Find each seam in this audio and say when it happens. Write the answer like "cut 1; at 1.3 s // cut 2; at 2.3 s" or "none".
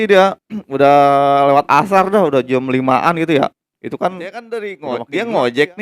cut 1; at 4.7 s